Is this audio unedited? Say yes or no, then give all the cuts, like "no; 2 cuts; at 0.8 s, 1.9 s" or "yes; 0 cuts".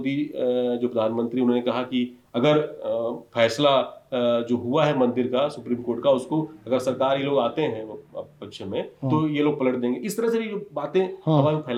yes; 0 cuts